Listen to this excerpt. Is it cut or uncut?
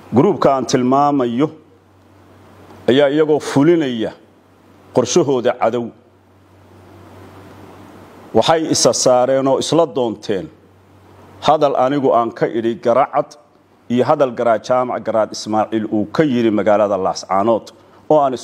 uncut